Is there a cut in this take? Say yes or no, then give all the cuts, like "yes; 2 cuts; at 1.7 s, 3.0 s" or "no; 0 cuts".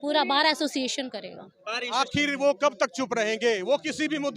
yes; 1 cut; at 1.9 s